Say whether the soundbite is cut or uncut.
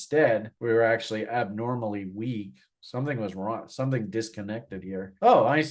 uncut